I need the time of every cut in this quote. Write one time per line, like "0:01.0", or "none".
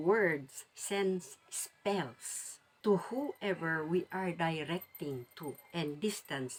none